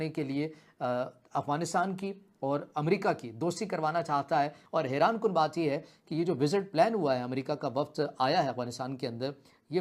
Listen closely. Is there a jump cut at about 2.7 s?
no; 1 cut; at 4.6 s

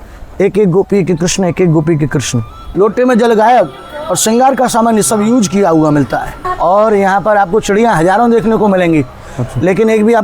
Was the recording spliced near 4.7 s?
no; 2 cuts; at 2.6 s, 6.5 s

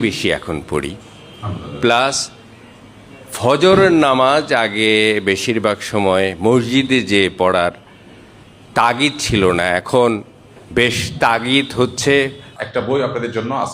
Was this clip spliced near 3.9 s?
no; 1 cut; at 12.5 s

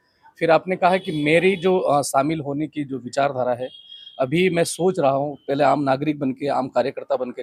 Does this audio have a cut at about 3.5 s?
no; 0 cuts

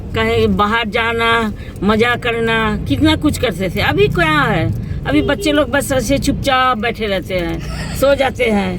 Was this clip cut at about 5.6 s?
no; 0 cuts

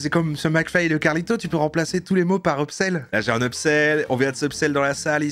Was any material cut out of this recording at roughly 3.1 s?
yes; 1 cut; at 3.1 s

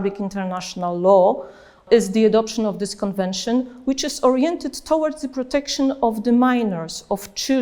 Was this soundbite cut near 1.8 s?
yes; 1 cut; at 1.8 s

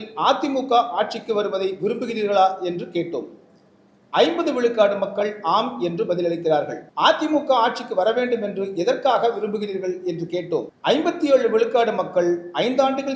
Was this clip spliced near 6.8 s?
yes; 2 cuts; at 6.8 s, 10.7 s

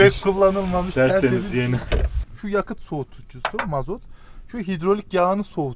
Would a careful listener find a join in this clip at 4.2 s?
no; 1 cut; at 2.2 s

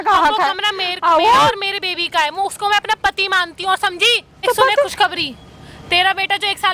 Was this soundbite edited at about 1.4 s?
no; 1 cut; at 4.4 s

